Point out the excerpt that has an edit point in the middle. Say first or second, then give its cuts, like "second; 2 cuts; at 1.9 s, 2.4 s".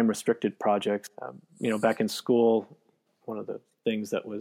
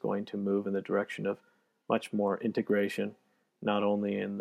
first; 2 cuts; at 1.1 s, 3.1 s